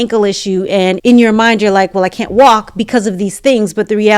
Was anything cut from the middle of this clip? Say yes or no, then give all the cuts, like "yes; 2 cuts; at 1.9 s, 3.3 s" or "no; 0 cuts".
yes; 1 cut; at 1.0 s